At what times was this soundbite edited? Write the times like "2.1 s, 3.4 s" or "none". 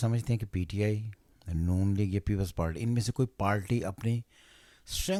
none